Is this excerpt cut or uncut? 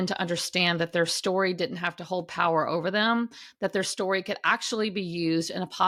uncut